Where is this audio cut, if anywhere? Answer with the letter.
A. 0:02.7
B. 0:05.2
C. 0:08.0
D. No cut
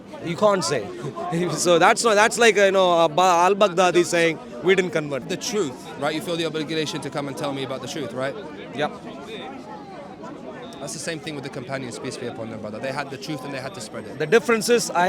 B